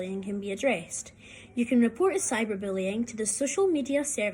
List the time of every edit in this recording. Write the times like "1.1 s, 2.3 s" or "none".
none